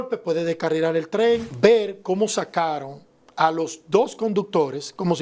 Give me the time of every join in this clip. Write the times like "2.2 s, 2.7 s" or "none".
1.5 s